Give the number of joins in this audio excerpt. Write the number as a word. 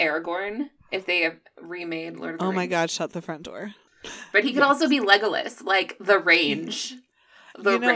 one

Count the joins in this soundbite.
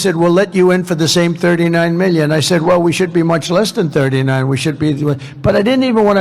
zero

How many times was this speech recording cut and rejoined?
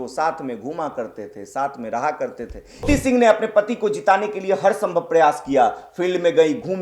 one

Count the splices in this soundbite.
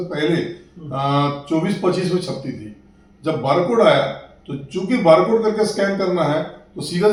zero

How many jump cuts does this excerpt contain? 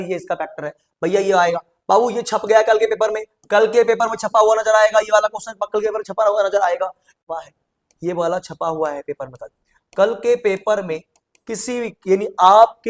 one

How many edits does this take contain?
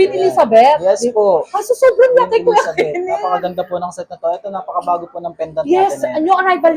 zero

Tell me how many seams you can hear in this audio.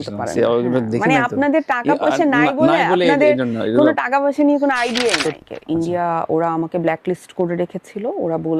one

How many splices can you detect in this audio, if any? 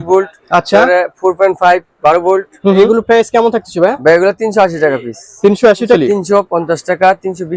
two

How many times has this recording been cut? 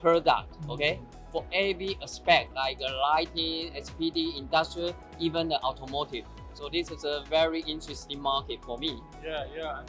zero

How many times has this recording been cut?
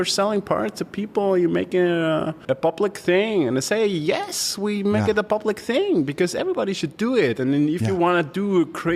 one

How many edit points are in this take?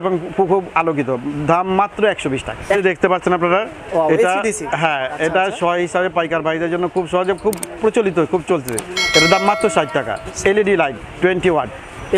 two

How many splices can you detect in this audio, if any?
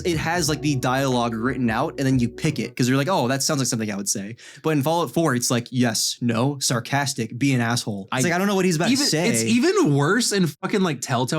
one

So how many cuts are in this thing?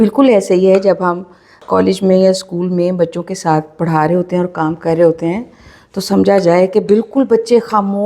one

